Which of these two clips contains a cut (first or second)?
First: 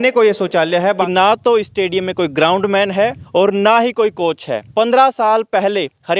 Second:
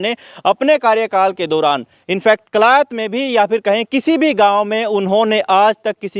first